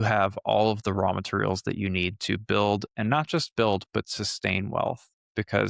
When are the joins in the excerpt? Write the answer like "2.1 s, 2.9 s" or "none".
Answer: none